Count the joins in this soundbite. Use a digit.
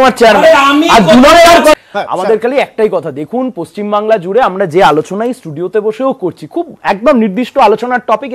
1